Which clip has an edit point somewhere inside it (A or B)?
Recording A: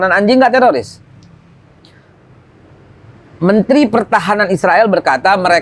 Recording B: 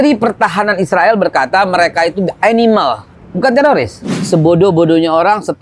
B